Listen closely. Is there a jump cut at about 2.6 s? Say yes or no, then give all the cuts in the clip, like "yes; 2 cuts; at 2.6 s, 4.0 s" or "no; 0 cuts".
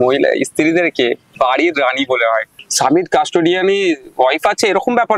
yes; 2 cuts; at 1.3 s, 2.6 s